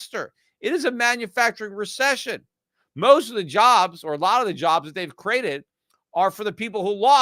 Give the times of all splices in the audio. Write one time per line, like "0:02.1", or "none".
none

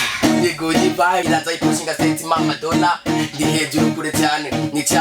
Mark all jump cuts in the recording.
0:01.2

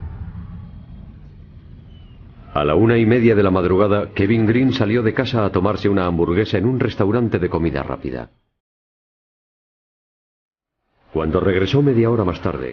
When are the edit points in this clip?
none

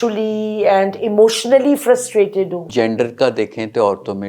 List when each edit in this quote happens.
0:02.6

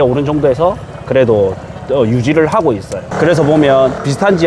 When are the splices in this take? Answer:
0:03.0

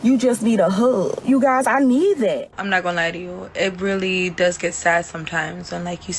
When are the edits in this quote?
0:01.2
0:02.6

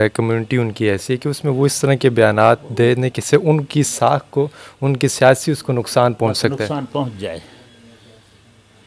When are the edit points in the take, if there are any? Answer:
none

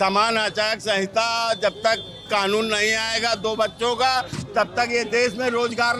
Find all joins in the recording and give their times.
none

